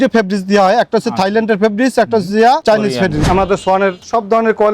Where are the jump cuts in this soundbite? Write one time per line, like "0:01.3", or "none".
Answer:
0:03.3